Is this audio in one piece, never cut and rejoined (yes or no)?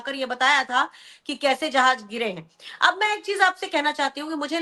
yes